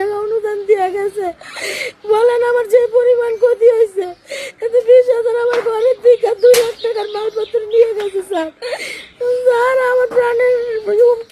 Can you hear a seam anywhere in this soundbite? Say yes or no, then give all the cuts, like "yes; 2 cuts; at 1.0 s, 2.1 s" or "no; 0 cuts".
no; 0 cuts